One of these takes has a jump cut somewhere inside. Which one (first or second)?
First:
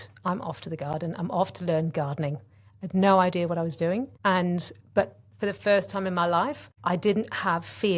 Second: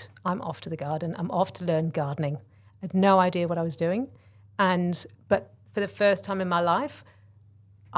first